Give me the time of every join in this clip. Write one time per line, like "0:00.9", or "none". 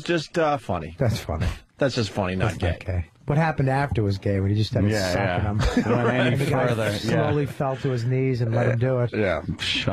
none